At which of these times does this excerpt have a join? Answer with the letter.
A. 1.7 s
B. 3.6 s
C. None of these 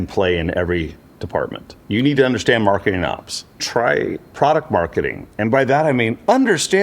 B